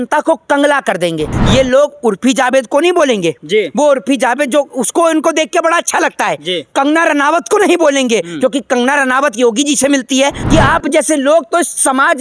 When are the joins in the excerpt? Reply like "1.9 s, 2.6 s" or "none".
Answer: 1.4 s, 10.4 s